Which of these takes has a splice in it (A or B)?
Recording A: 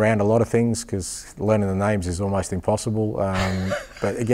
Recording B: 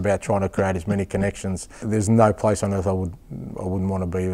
B